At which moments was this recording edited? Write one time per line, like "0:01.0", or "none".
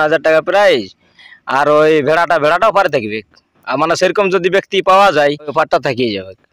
0:05.5